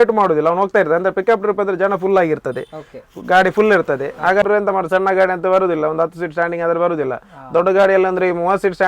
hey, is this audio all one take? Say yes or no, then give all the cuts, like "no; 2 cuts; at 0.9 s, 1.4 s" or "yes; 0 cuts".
no; 1 cut; at 4.4 s